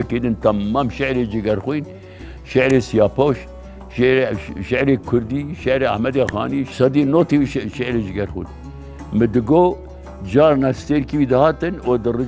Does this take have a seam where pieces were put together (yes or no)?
yes